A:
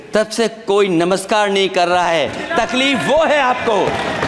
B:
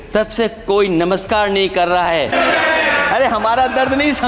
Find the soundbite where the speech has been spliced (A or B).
B